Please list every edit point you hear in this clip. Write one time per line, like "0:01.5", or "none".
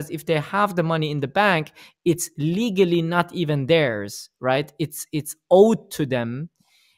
none